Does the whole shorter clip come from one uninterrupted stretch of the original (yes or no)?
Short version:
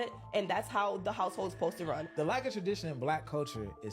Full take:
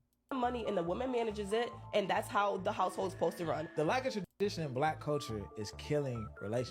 no